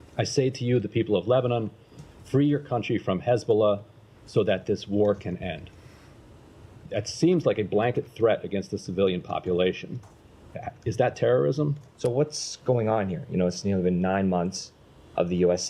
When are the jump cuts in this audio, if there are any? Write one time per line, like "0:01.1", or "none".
0:11.8